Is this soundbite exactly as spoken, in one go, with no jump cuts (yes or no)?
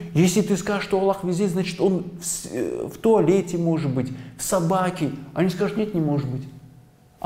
yes